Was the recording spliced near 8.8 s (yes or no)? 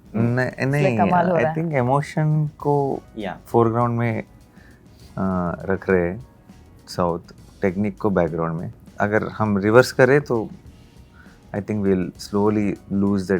yes